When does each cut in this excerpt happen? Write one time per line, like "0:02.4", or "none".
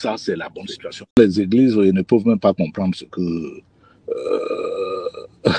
0:01.2